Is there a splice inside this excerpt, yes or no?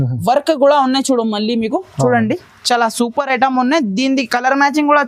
no